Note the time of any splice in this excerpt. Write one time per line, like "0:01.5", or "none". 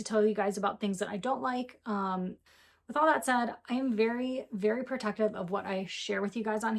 0:02.4